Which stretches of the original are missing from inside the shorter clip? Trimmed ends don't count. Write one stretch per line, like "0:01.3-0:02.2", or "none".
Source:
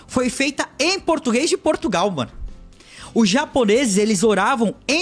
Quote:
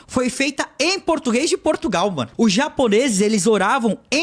0:02.2-0:03.0